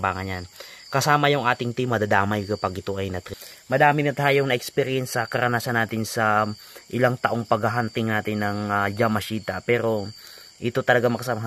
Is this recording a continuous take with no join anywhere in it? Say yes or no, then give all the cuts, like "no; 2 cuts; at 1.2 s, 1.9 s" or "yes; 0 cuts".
no; 1 cut; at 3.3 s